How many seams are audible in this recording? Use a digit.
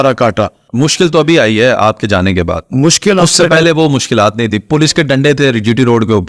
0